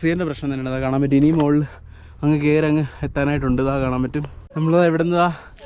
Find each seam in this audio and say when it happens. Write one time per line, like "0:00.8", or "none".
none